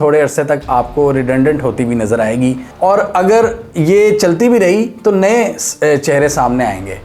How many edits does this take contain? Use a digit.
0